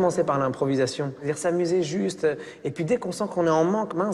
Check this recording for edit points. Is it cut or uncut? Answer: cut